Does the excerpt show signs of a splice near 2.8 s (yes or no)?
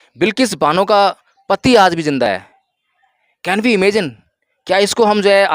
no